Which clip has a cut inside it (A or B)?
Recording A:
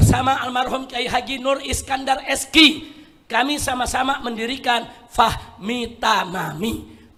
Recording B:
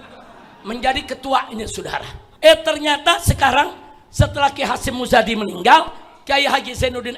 B